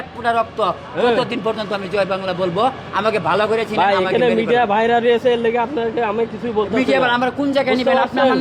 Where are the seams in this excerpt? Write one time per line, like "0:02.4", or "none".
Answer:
none